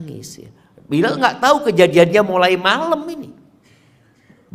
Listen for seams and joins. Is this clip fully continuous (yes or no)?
yes